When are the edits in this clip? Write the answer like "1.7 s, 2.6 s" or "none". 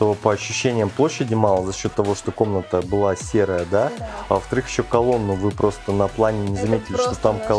none